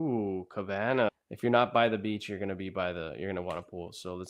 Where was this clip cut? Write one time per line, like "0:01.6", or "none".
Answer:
0:01.1